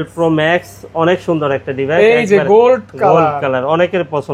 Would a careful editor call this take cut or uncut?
uncut